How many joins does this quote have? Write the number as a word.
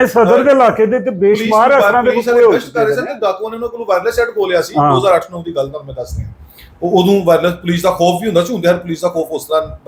zero